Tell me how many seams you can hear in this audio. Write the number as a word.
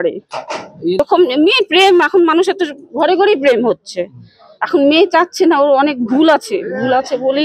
one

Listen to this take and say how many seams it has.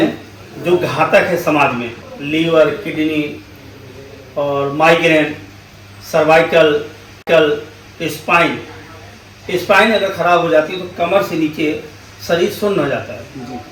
zero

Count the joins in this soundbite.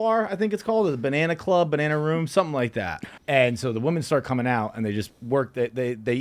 one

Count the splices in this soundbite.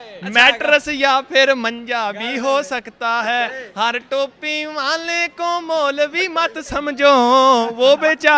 zero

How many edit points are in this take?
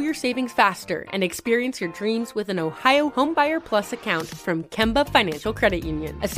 zero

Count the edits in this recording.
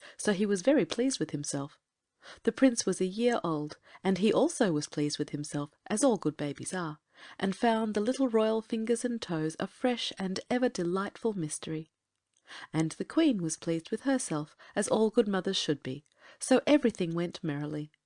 one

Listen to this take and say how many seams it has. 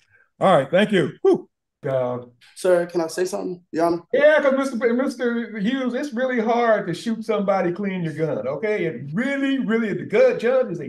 one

